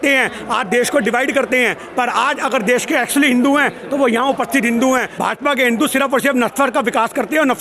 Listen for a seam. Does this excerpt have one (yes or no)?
yes